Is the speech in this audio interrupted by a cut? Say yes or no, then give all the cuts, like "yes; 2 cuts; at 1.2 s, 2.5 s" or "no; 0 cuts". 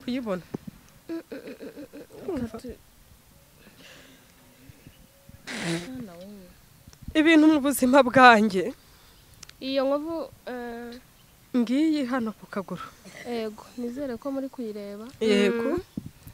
no; 0 cuts